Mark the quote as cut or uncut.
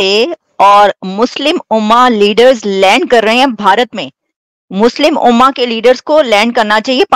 uncut